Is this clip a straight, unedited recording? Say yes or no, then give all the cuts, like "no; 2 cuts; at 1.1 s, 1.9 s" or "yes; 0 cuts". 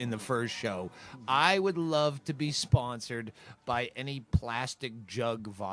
yes; 0 cuts